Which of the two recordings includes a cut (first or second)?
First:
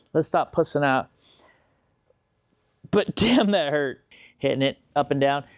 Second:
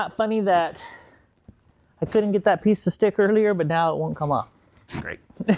first